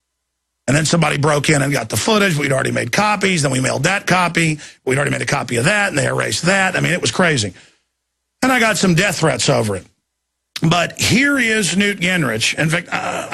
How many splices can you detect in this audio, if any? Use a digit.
0